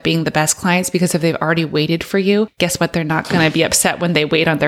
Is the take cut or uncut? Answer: cut